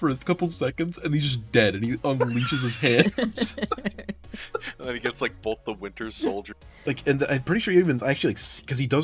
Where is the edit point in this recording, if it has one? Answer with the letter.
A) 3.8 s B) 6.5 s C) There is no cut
B